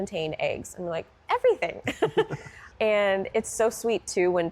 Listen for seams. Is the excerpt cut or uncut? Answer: cut